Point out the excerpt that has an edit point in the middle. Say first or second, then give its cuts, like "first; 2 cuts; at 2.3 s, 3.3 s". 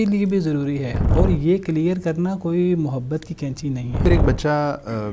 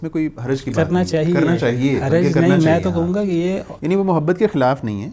first; 2 cuts; at 1.0 s, 4.0 s